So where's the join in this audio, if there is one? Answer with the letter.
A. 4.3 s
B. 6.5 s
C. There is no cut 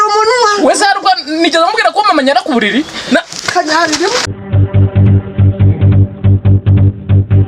A